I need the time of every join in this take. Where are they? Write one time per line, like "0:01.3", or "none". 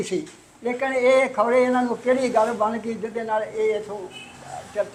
none